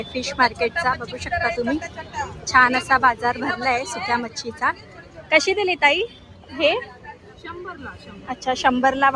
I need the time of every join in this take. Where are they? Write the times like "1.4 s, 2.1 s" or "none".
none

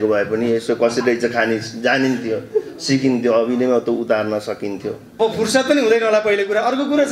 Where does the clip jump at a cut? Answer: 5.0 s

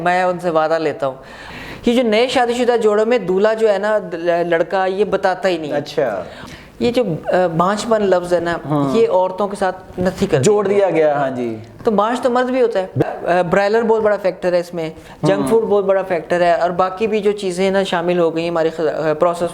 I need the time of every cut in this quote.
1.3 s, 6.4 s, 13.0 s

